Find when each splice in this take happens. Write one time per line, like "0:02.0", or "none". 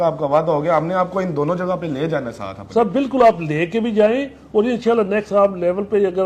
none